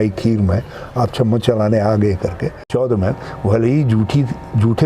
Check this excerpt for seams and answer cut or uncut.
cut